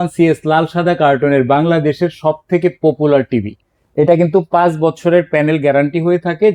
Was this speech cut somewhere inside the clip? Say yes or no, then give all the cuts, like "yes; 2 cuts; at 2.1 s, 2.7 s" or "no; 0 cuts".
no; 0 cuts